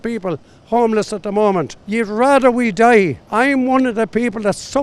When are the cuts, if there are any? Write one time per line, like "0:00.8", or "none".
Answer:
0:01.8
0:03.2